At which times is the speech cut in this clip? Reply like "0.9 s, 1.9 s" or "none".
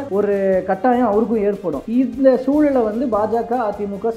none